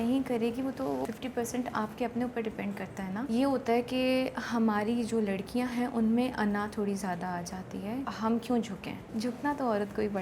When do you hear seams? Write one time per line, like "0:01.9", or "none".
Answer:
0:01.1
0:03.2
0:08.1
0:09.1